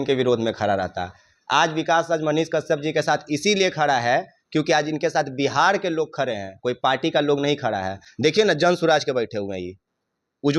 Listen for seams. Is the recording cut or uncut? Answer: uncut